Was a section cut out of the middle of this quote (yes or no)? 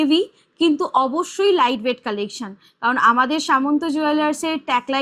no